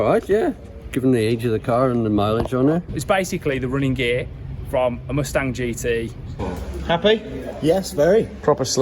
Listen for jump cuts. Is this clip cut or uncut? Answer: cut